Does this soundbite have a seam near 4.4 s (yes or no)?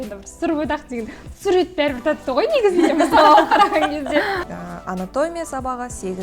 yes